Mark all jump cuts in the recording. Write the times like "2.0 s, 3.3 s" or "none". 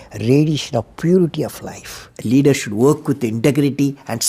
2.1 s